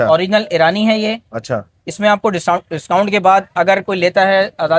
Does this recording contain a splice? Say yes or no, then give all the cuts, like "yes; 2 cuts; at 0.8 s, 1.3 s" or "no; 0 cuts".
no; 0 cuts